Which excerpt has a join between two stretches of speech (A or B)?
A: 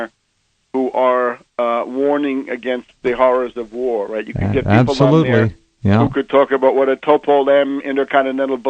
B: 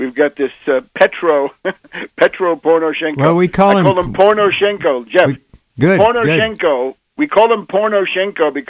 A